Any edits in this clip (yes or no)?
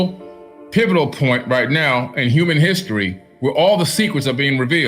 yes